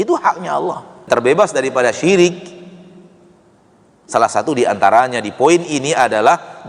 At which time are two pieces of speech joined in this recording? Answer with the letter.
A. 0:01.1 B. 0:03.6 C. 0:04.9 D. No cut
A